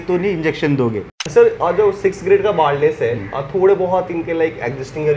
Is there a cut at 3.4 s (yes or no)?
no